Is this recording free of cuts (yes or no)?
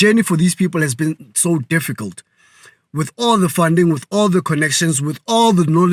yes